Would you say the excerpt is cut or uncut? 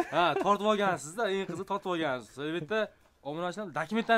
uncut